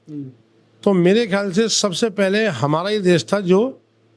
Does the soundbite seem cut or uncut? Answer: uncut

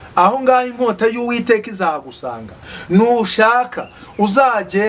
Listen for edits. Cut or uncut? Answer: uncut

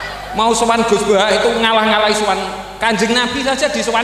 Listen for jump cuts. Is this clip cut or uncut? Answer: uncut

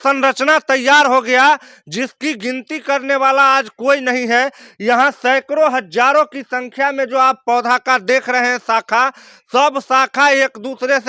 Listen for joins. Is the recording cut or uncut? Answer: uncut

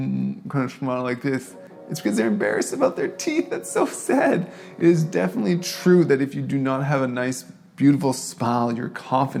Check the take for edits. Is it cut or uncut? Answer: uncut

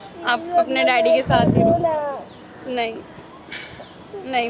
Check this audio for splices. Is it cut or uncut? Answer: uncut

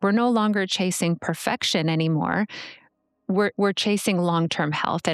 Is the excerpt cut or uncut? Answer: uncut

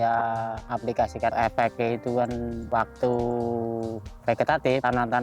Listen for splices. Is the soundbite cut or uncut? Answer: cut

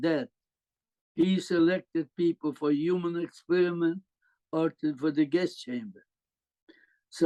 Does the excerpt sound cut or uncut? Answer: uncut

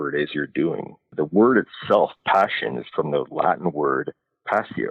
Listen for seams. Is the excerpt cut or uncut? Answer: cut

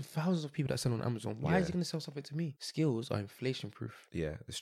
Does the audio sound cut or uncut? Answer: cut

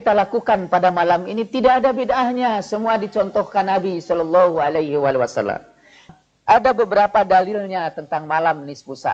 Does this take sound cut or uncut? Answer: cut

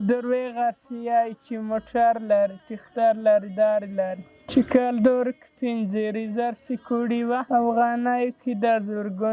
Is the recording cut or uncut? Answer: cut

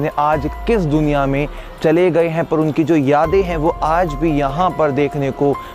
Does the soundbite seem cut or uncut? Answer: uncut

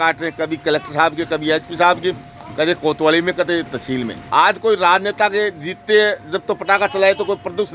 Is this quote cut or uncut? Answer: cut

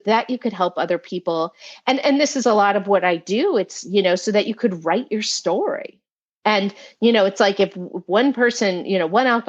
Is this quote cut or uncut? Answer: uncut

